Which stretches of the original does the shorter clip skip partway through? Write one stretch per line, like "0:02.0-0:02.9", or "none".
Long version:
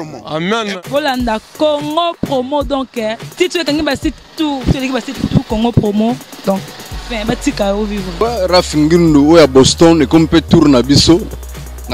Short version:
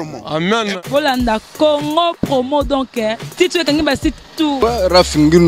0:04.6-0:08.2